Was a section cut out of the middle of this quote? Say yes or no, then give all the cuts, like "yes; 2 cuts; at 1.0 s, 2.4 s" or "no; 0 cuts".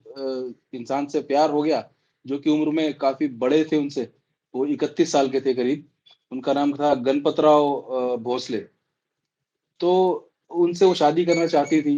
no; 0 cuts